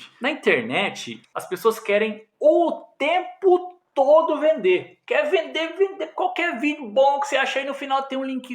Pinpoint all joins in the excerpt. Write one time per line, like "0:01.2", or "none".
0:01.2

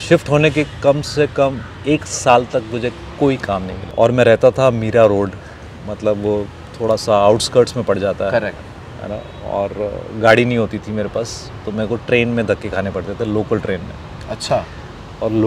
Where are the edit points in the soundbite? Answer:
0:03.8

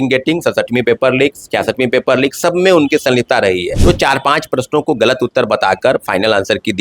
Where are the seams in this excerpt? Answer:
0:03.7

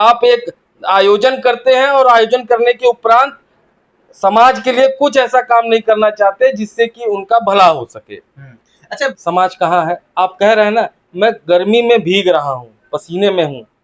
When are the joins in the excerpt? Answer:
0:09.2

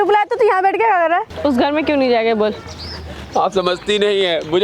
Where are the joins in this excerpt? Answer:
0:01.3

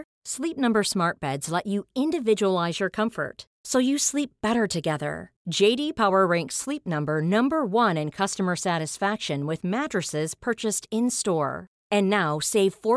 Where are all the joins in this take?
none

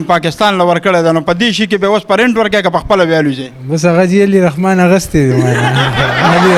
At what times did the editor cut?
none

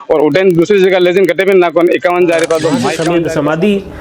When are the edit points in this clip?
0:03.0

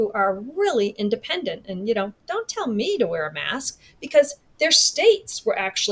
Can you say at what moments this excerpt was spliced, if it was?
none

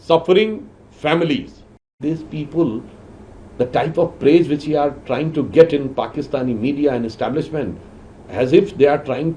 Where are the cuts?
0:02.0

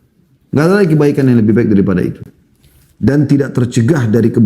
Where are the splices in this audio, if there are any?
none

